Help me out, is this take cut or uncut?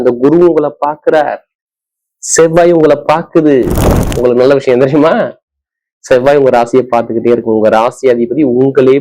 cut